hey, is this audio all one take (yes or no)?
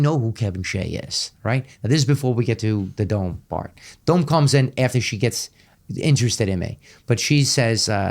yes